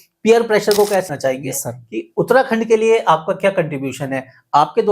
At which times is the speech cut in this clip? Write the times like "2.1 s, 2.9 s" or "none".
1.1 s